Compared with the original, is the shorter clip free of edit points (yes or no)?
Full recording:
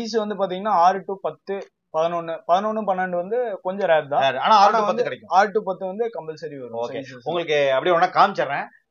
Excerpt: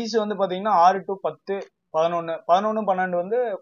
yes